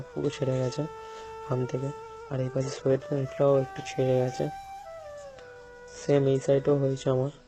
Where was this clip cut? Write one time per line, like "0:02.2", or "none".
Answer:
none